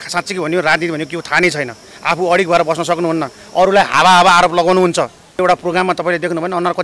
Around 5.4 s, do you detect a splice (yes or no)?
yes